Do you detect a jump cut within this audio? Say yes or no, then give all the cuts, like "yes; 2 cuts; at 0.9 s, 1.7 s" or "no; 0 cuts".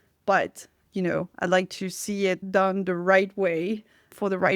no; 0 cuts